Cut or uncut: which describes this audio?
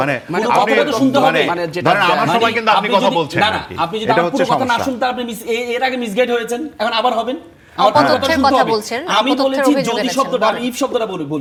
uncut